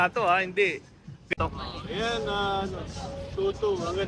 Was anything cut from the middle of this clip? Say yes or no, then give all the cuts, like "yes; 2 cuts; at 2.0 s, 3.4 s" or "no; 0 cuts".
yes; 1 cut; at 1.1 s